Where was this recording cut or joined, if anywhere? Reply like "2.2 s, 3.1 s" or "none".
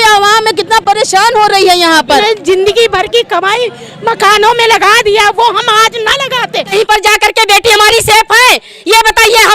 2.2 s, 6.7 s